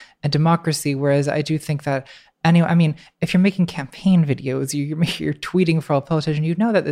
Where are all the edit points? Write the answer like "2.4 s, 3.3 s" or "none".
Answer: none